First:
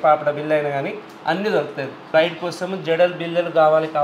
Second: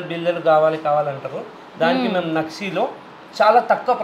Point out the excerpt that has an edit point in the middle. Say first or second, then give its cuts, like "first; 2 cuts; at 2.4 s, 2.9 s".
first; 1 cut; at 2.0 s